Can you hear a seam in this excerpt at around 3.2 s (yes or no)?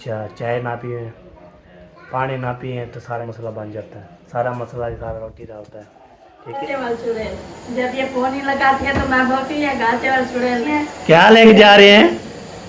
yes